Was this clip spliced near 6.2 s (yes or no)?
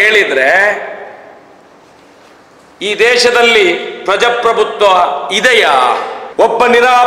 yes